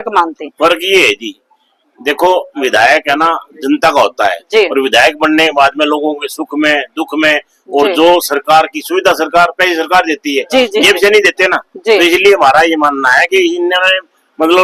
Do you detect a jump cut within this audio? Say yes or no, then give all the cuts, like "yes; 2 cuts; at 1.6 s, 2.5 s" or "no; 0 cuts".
no; 0 cuts